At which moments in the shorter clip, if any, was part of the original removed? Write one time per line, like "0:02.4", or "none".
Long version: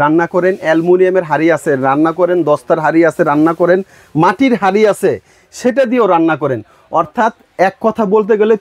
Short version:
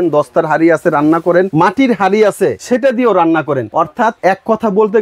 0:01.5
0:02.6
0:04.0